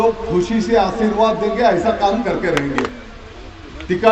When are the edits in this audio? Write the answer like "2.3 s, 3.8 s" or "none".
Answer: 2.9 s

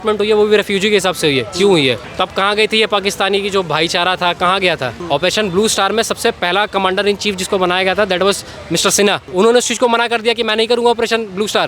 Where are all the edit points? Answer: 4.9 s

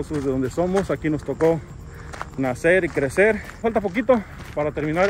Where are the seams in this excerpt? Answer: 3.6 s

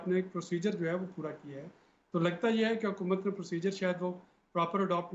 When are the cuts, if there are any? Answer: none

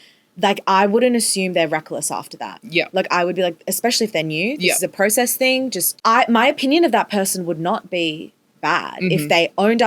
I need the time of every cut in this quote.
5.9 s

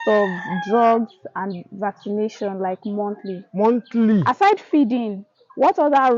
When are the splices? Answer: 4.2 s

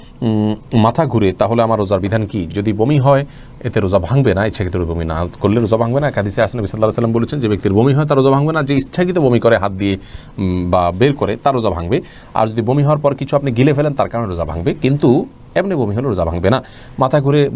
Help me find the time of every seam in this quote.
none

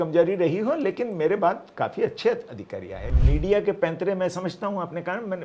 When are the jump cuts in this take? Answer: 3.1 s

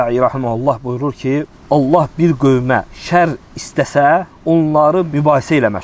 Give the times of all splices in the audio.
1.6 s, 3.0 s, 4.8 s

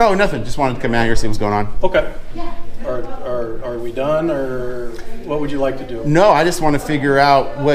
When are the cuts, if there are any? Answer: none

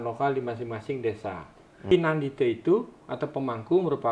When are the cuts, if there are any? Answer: 1.9 s

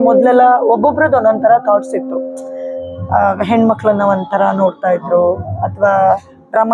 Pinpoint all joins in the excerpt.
none

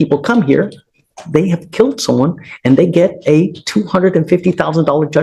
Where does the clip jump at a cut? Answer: none

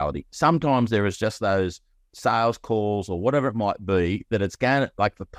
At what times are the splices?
none

